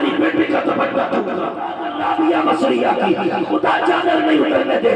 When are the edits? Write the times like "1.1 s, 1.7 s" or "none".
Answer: 1.8 s